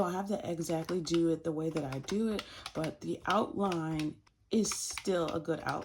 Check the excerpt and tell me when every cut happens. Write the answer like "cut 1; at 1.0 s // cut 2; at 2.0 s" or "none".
cut 1; at 4.3 s